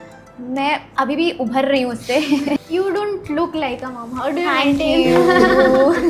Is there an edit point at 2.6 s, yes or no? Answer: yes